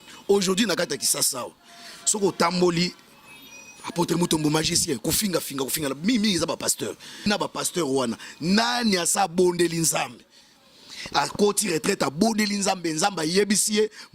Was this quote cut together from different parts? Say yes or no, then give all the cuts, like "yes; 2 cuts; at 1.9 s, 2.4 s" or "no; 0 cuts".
yes; 1 cut; at 7.3 s